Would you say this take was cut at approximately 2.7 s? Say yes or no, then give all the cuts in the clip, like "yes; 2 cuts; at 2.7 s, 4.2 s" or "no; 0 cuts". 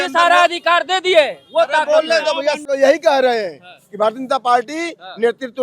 yes; 1 cut; at 2.7 s